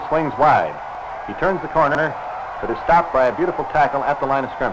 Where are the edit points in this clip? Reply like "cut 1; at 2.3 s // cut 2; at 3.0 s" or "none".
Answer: cut 1; at 1.9 s